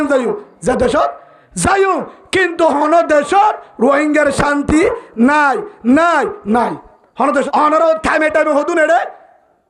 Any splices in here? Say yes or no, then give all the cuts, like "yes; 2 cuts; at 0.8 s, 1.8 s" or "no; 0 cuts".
yes; 1 cut; at 7.5 s